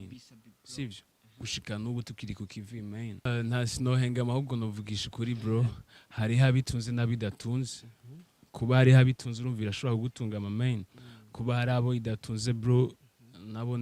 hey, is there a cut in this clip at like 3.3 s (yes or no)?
yes